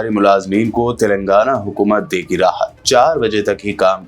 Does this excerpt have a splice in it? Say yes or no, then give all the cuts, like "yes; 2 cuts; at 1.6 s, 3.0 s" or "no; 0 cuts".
no; 0 cuts